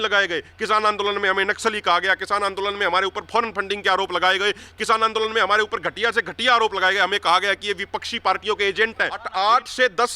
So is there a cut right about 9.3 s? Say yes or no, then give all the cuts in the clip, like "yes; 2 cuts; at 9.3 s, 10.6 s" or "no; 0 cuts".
yes; 1 cut; at 9.3 s